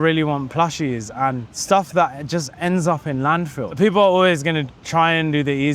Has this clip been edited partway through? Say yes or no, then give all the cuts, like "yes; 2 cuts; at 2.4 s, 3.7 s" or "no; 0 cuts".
yes; 2 cuts; at 1.5 s, 3.8 s